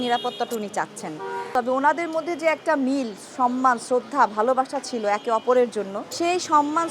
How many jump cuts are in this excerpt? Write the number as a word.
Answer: one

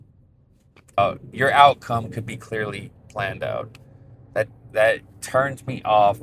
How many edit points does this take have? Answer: one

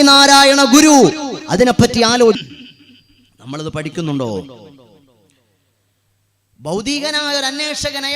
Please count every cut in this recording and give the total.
one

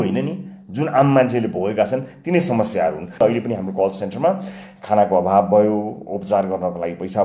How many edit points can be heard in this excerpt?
one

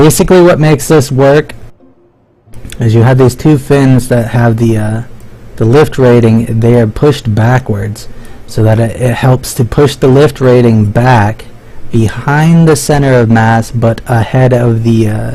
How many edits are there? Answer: zero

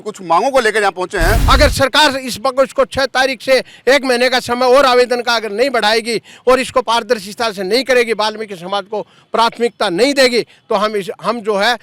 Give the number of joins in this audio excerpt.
one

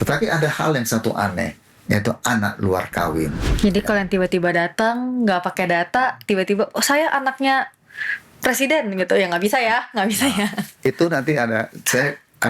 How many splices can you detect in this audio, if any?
one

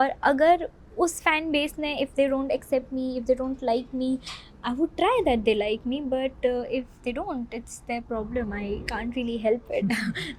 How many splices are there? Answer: zero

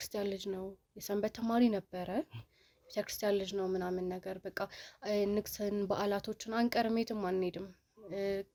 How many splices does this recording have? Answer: zero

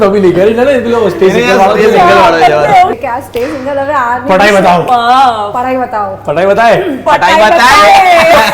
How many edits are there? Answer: one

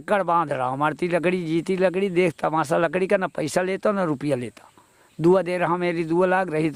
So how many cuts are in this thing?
zero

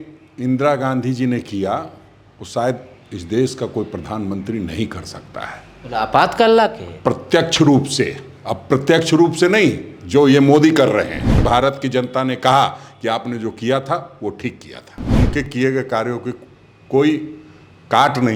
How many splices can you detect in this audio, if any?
two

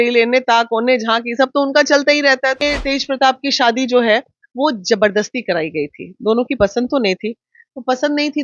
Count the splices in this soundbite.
one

